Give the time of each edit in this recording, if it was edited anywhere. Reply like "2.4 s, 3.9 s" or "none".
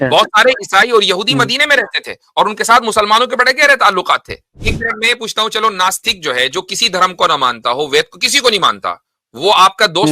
4.6 s